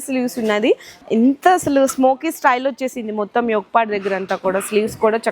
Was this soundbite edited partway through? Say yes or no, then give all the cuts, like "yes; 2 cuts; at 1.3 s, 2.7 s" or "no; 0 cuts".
yes; 1 cut; at 1.0 s